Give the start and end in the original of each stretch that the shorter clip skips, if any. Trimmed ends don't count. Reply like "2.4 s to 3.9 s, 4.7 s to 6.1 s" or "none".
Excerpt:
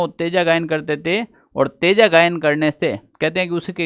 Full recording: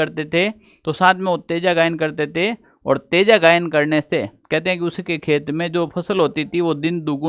none